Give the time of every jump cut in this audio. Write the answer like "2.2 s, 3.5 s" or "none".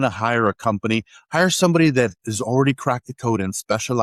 none